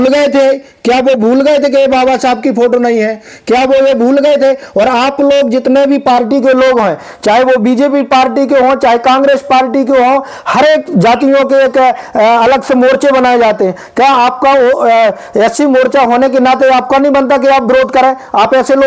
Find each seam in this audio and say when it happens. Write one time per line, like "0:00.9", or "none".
none